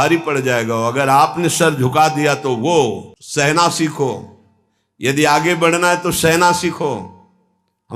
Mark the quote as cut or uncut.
cut